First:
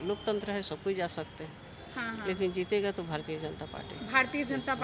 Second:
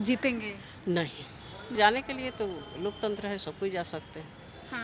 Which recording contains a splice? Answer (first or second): second